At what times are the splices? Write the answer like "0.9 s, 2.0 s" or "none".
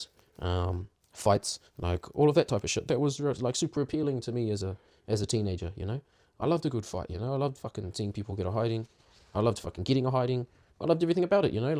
none